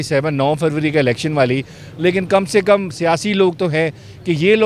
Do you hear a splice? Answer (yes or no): no